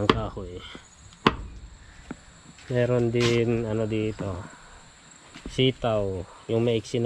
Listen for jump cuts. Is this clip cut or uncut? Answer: uncut